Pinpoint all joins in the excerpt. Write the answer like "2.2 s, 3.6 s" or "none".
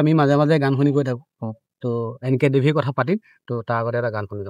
none